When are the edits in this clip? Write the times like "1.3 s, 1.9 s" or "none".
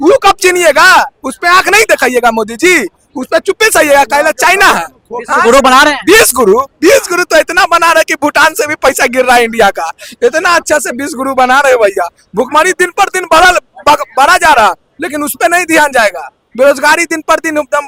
none

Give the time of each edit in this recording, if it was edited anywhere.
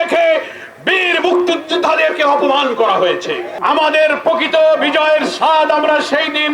3.5 s

